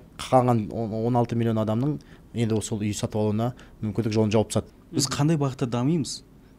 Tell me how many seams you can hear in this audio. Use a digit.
1